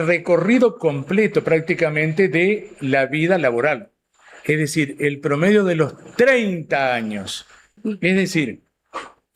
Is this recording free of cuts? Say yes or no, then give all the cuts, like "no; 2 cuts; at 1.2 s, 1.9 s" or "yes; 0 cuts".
no; 1 cut; at 7.7 s